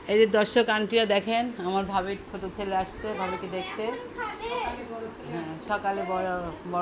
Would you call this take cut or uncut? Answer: uncut